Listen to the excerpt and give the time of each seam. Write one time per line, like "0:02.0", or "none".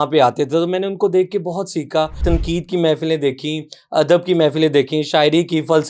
0:02.2